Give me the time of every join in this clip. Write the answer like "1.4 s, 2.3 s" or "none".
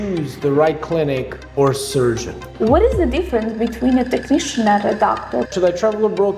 2.4 s, 5.5 s